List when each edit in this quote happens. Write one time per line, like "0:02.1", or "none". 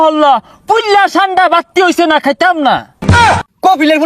0:03.1